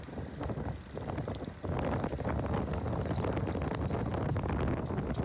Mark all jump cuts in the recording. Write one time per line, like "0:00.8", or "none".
none